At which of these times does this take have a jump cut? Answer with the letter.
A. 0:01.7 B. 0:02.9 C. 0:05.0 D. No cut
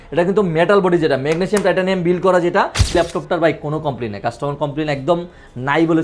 B